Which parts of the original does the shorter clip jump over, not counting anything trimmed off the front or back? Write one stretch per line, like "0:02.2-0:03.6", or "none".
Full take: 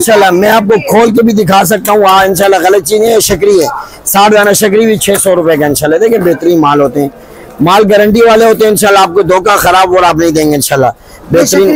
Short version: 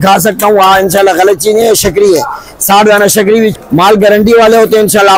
0:05.0-0:07.4